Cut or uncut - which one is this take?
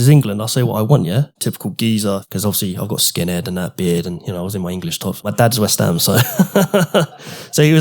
cut